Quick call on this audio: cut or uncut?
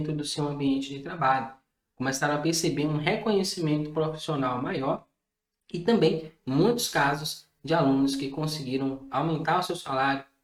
uncut